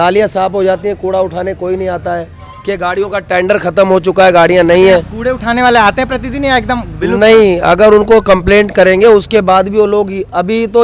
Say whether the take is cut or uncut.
uncut